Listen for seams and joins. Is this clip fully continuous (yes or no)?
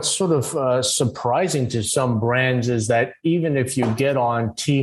yes